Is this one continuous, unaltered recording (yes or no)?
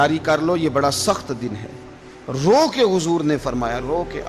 yes